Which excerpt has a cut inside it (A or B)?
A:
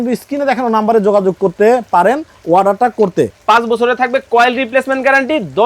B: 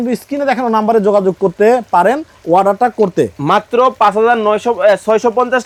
A